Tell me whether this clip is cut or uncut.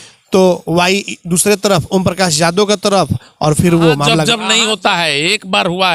cut